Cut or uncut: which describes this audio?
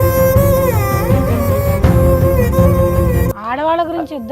cut